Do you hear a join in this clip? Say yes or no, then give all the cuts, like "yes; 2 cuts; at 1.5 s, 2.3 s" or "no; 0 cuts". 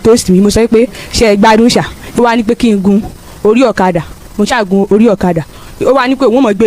yes; 1 cut; at 2.0 s